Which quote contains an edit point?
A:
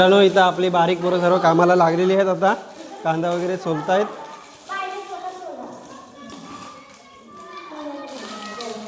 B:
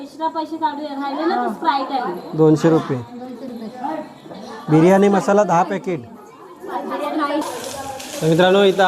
B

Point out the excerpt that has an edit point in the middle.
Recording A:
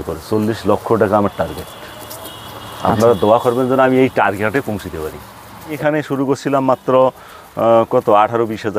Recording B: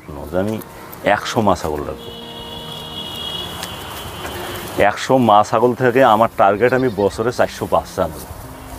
A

